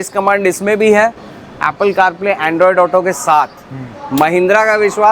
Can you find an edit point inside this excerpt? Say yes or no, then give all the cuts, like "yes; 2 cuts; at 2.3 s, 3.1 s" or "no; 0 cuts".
no; 0 cuts